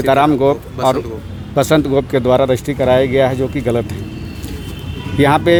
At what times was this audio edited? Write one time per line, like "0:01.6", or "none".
none